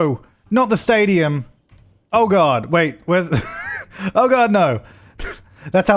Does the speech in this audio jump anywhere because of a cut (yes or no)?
no